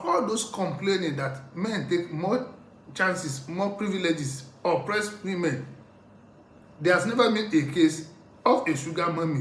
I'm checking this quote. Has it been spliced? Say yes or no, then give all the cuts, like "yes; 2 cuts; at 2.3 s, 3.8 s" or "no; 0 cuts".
no; 0 cuts